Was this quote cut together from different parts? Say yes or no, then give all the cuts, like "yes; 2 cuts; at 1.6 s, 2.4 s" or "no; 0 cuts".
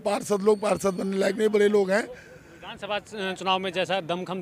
no; 0 cuts